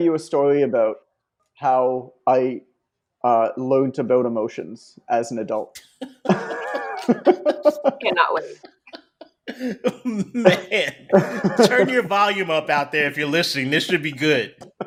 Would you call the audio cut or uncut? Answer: uncut